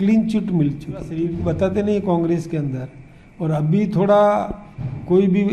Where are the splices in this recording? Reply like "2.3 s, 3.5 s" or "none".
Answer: 1.2 s